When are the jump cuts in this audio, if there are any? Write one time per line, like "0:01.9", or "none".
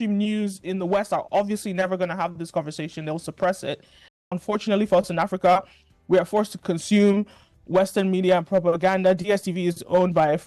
0:04.4